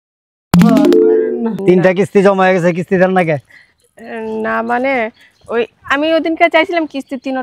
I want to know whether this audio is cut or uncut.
cut